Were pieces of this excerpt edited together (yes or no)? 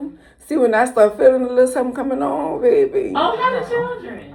no